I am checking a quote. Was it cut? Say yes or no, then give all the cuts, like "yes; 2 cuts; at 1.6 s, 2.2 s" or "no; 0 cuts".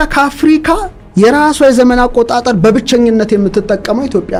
no; 0 cuts